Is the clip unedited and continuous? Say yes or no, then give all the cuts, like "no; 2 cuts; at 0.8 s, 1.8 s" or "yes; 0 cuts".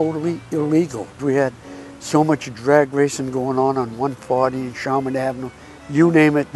no; 1 cut; at 1.2 s